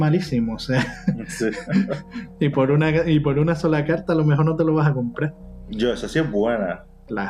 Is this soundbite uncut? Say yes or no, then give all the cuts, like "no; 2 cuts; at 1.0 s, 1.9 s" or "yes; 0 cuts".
yes; 0 cuts